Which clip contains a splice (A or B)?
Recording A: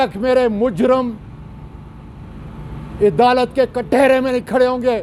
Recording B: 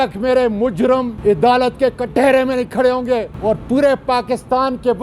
B